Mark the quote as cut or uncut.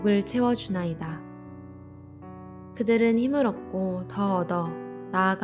cut